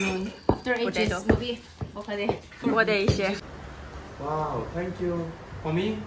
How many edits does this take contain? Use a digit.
1